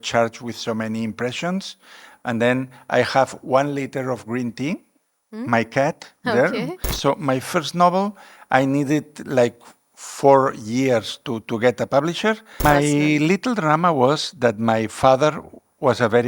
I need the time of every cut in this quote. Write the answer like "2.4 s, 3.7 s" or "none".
6.9 s, 12.6 s